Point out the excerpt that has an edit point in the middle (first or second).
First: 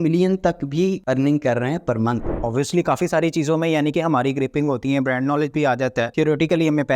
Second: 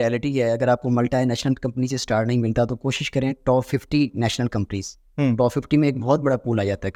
first